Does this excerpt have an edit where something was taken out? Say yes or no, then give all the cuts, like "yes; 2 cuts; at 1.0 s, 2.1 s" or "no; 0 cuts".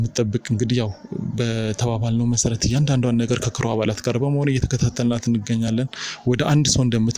no; 0 cuts